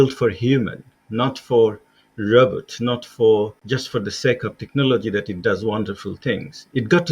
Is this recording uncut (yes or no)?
no